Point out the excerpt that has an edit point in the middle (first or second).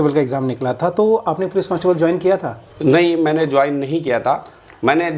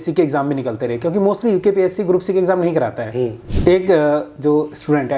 second